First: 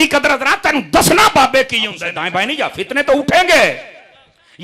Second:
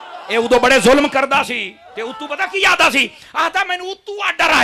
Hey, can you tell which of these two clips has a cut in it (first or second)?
first